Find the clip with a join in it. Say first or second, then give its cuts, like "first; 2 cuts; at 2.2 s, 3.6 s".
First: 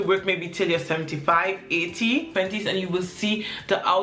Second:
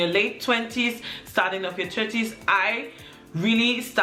first; 1 cut; at 2.4 s